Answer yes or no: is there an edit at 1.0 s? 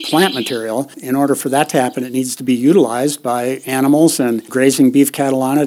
yes